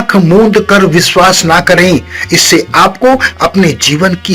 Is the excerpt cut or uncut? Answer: uncut